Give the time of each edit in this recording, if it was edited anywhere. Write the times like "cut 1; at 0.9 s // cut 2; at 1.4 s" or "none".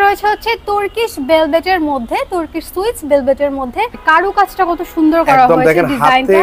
cut 1; at 4.0 s